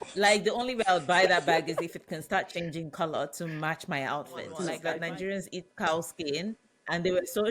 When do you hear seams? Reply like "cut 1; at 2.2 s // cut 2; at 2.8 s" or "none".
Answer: cut 1; at 4.7 s